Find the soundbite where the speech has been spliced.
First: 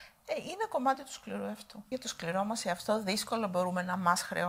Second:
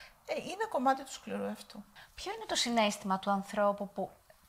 first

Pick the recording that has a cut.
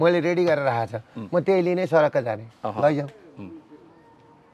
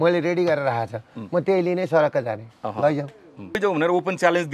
second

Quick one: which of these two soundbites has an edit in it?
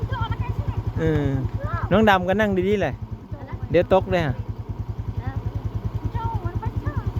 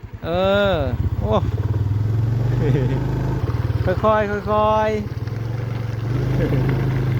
second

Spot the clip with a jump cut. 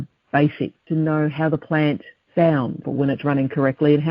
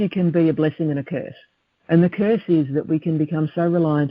first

